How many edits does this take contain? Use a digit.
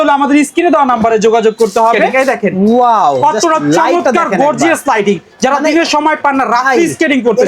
1